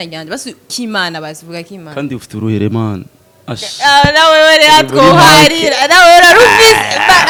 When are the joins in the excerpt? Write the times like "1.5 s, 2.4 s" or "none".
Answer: none